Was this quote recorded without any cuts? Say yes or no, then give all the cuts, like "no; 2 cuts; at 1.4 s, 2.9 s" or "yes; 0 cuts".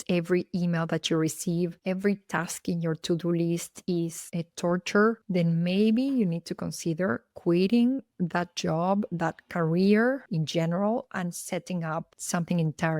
no; 3 cuts; at 5.2 s, 10.3 s, 12.2 s